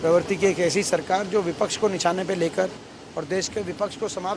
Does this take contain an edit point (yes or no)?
no